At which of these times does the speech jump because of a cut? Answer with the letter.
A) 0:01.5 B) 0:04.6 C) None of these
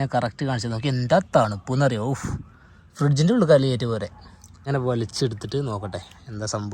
B